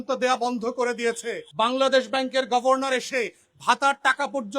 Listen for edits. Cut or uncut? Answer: cut